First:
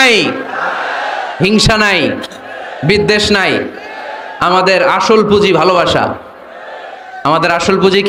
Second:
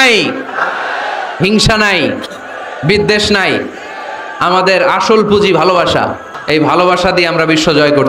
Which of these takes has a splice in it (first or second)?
second